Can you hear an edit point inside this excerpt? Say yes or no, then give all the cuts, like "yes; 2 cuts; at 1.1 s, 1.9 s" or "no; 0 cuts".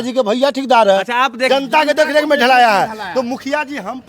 yes; 1 cut; at 1.4 s